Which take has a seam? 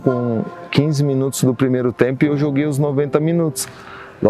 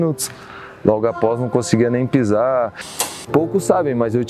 second; 1 cut; at 3.0 s

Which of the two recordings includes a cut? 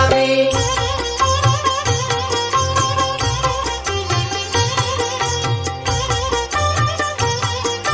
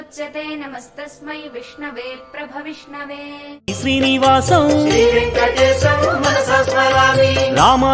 second; 1 cut; at 3.5 s

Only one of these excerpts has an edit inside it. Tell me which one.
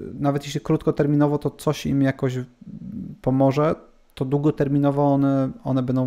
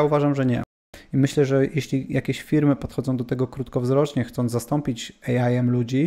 second; 1 cut; at 1.0 s

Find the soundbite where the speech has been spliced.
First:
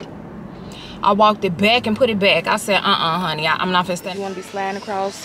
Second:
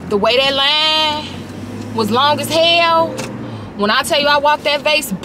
first; 1 cut; at 4.0 s

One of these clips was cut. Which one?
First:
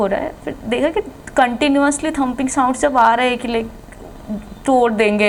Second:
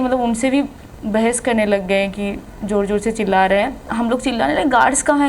second; 1 cut; at 3.8 s

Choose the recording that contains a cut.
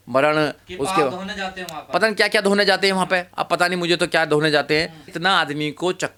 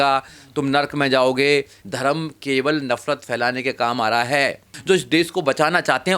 second; 2 cuts; at 1.8 s, 4.7 s

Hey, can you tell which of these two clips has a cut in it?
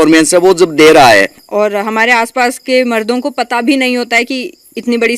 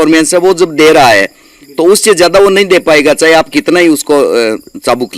first; 1 cut; at 1.4 s

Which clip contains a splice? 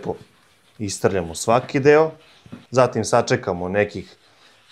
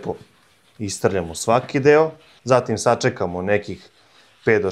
second; 1 cut; at 2.3 s

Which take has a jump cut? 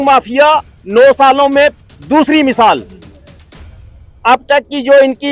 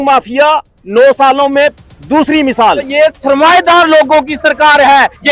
second; 1 cut; at 2.8 s

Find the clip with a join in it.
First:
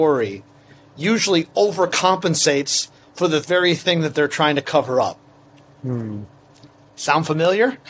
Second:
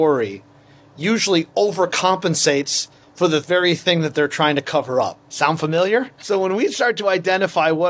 second; 2 cuts; at 5.2 s, 6.2 s

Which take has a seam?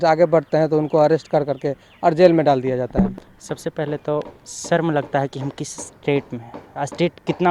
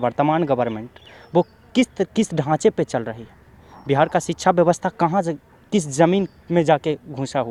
first; 1 cut; at 3.2 s

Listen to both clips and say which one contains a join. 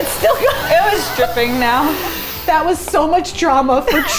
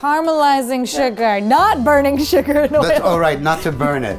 first; 1 cut; at 2.3 s

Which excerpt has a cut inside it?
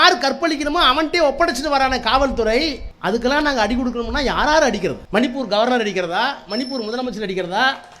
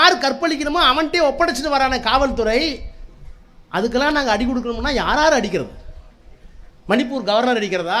first; 2 cuts; at 2.9 s, 5.0 s

